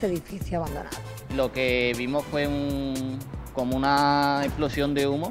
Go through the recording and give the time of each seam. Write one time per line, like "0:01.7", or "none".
0:01.1